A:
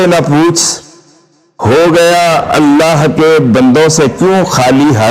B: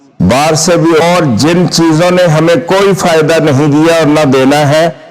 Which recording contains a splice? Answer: B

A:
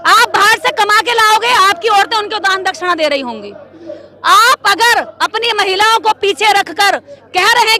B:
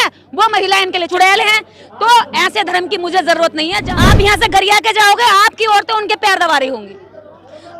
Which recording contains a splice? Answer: B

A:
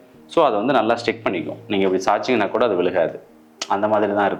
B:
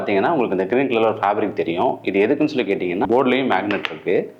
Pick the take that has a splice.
B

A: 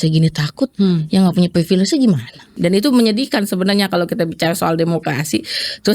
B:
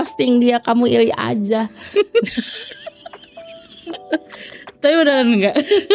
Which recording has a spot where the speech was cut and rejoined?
A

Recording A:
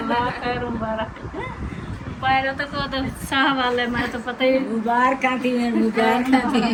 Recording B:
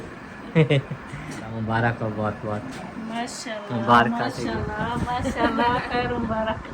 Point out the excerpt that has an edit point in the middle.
B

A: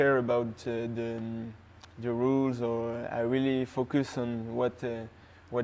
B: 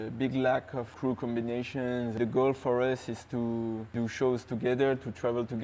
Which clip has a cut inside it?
B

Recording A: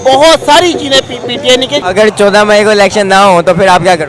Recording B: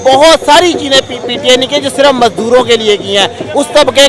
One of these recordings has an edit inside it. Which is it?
A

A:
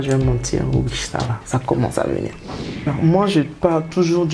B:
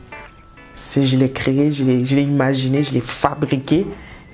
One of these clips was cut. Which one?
A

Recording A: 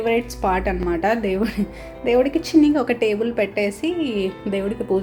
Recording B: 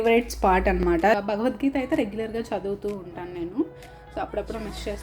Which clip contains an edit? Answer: B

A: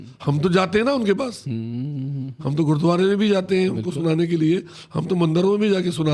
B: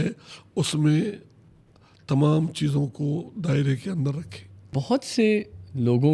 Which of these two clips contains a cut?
B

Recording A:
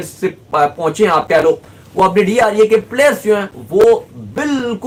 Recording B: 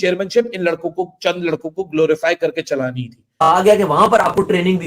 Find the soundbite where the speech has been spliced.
B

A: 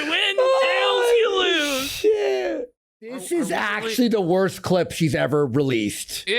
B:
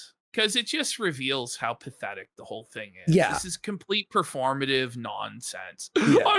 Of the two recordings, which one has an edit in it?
A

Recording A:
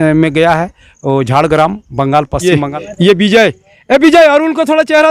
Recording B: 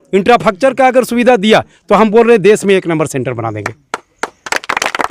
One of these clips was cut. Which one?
A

